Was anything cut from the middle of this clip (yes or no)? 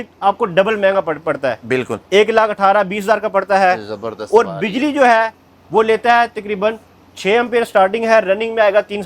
no